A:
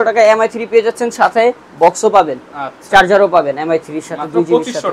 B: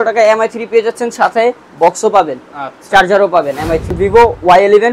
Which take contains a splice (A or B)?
B